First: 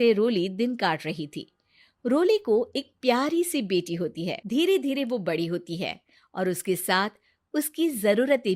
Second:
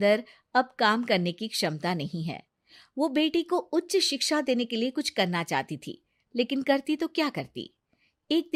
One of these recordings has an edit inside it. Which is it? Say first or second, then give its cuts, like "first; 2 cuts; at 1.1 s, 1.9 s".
first; 1 cut; at 4.4 s